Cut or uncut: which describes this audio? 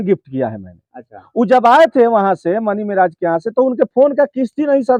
uncut